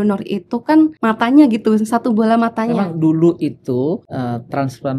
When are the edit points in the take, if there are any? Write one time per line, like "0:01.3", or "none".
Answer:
0:01.0
0:02.7
0:04.1